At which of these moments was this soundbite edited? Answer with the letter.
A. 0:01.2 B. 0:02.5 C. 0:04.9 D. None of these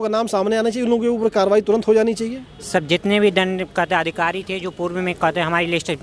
D